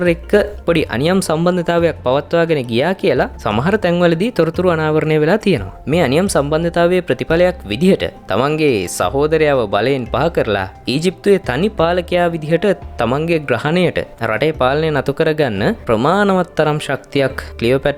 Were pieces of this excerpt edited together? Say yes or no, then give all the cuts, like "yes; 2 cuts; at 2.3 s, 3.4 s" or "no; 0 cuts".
no; 0 cuts